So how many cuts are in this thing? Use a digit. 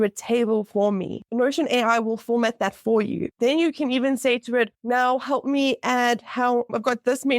3